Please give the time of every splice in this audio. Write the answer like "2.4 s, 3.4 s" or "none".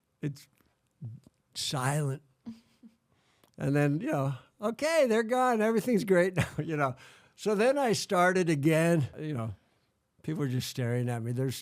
9.2 s